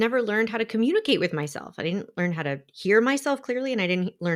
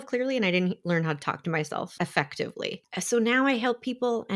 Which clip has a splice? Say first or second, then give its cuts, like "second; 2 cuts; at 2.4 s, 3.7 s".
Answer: second; 2 cuts; at 1.9 s, 2.8 s